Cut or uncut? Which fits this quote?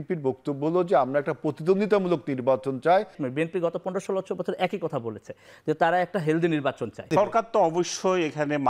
cut